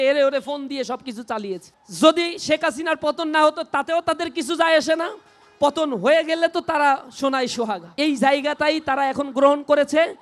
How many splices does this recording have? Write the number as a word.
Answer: two